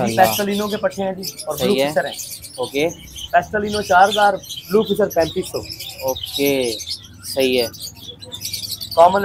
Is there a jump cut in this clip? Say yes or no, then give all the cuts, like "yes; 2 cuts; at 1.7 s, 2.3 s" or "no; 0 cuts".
no; 0 cuts